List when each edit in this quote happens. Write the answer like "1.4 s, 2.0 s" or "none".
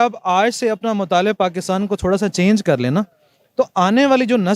none